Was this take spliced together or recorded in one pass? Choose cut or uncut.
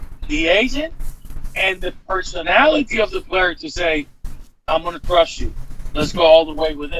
uncut